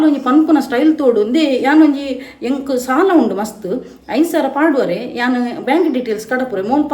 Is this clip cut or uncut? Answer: uncut